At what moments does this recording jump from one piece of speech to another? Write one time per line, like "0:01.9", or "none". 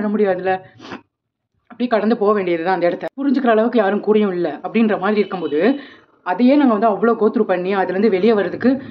0:03.1